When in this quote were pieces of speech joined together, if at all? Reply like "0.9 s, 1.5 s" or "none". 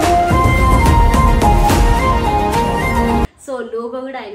3.4 s